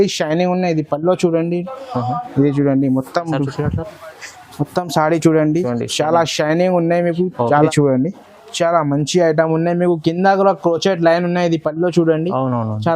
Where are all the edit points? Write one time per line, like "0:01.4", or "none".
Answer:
0:07.7

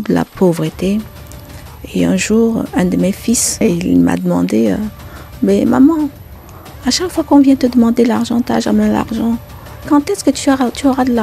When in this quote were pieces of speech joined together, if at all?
0:03.6

